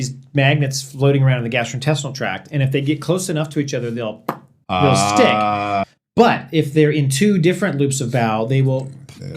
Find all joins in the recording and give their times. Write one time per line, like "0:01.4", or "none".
0:05.8